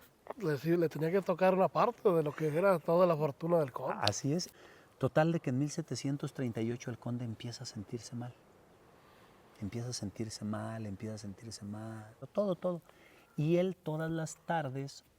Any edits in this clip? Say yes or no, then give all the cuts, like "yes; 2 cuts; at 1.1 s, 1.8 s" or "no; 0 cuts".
yes; 2 cuts; at 4.5 s, 12.3 s